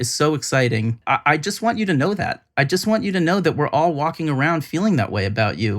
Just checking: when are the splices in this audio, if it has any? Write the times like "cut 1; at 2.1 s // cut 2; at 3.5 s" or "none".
cut 1; at 1.0 s